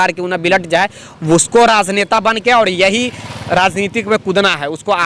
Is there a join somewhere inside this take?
no; 0 cuts

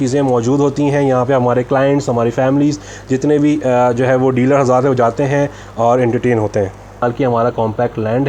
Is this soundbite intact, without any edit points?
no; 1 cut; at 7.0 s

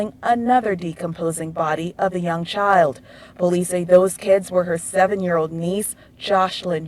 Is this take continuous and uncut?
no; 2 cuts; at 3.1 s, 5.8 s

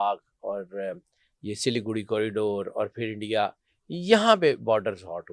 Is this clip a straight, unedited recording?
yes; 0 cuts

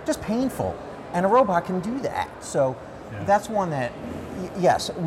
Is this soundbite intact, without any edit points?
yes; 0 cuts

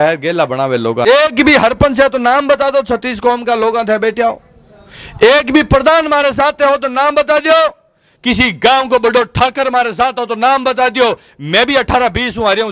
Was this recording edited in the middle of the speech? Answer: yes; 1 cut; at 1.0 s

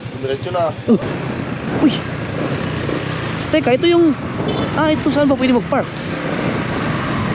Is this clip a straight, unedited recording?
no; 1 cut; at 1.0 s

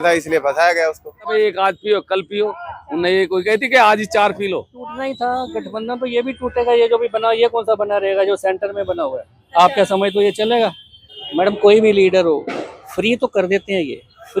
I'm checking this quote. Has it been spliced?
yes; 3 cuts; at 1.3 s, 4.9 s, 11.2 s

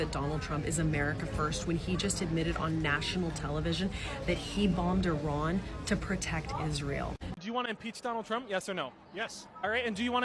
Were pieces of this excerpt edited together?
yes; 1 cut; at 7.3 s

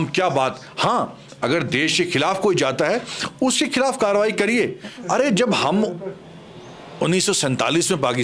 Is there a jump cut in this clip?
yes; 1 cut; at 5.0 s

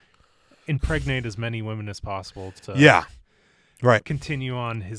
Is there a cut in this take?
no; 0 cuts

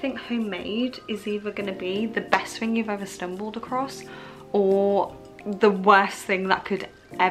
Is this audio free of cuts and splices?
yes; 0 cuts

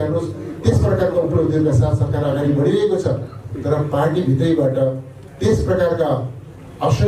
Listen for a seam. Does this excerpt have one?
no; 0 cuts

